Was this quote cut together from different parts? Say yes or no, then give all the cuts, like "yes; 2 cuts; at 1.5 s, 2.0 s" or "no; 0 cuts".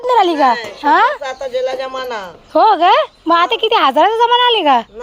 no; 0 cuts